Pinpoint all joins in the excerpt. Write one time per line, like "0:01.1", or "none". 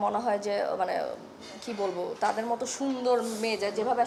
none